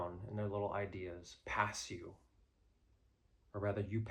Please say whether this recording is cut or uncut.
uncut